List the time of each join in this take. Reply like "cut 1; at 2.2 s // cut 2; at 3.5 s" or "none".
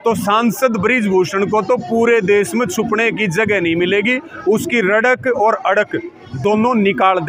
none